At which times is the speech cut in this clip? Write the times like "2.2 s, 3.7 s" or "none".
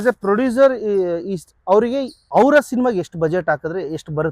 2.2 s